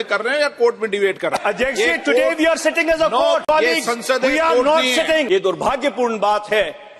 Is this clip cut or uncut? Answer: cut